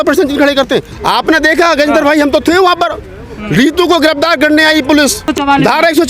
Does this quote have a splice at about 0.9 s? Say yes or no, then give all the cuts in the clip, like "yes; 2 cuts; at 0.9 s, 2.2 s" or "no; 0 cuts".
yes; 1 cut; at 0.9 s